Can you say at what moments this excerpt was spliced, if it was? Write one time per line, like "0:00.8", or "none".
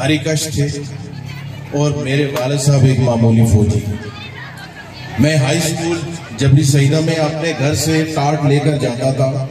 none